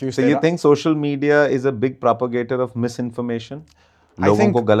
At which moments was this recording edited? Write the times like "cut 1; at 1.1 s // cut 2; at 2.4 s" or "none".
none